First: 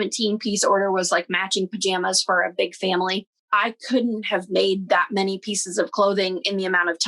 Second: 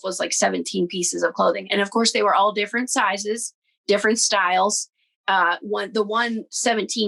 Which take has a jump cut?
first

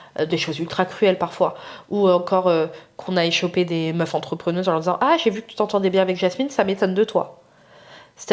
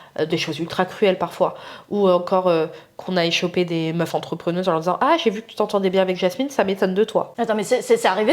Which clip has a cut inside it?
second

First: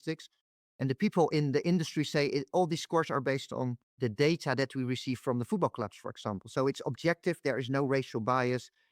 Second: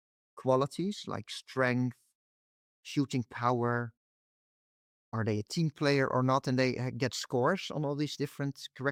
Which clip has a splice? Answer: first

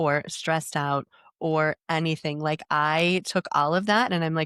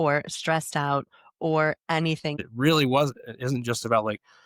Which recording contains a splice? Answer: second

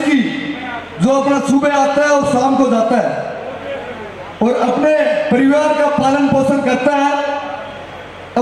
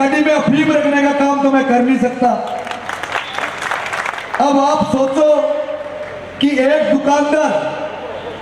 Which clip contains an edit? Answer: second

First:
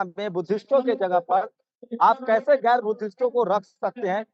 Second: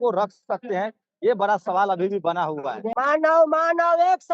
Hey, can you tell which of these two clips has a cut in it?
second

